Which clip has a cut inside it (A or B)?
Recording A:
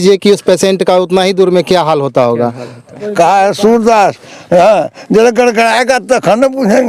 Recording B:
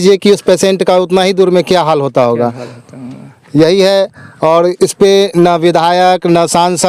A